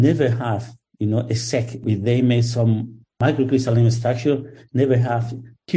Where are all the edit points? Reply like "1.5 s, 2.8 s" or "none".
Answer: 1.8 s

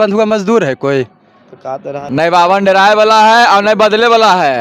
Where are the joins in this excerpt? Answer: 2.0 s

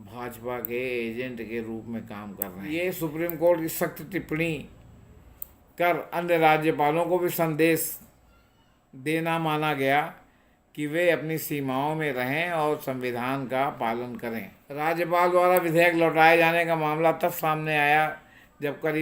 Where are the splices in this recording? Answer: 2.6 s, 14.6 s

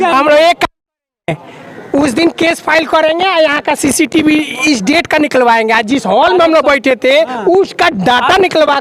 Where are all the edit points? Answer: none

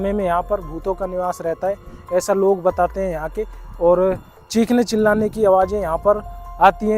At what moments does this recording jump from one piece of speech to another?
none

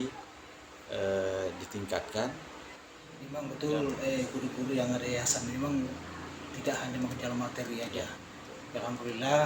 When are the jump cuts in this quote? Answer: 3.3 s

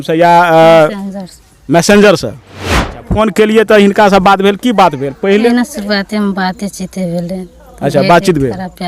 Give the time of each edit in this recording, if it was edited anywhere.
2.8 s, 5.5 s

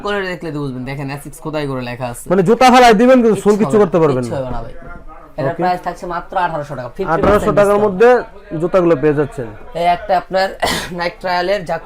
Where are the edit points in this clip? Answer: none

